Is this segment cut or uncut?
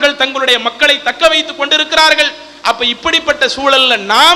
uncut